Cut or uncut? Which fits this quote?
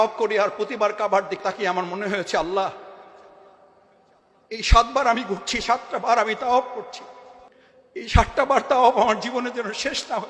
cut